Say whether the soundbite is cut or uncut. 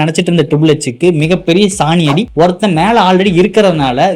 cut